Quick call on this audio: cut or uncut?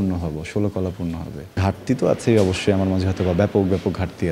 cut